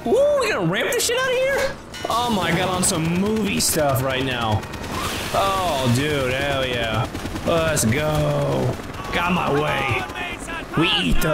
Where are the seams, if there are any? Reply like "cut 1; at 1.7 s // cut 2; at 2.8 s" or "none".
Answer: none